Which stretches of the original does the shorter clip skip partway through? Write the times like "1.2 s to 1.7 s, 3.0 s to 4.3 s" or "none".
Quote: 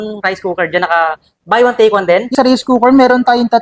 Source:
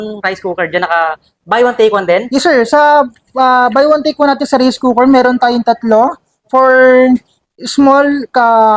2.3 s to 4.4 s